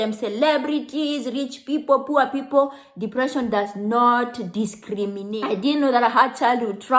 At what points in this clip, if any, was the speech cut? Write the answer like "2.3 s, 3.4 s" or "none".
5.2 s